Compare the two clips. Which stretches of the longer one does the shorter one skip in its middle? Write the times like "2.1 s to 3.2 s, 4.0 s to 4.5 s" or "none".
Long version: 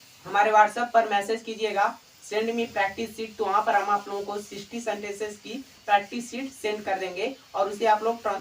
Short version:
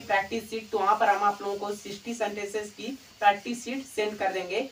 none